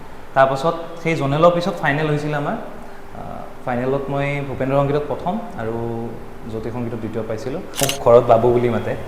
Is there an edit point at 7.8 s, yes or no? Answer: yes